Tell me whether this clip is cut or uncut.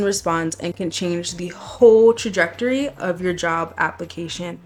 uncut